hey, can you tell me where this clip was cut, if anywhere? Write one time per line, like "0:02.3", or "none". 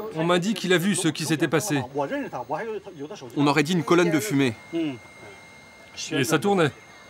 none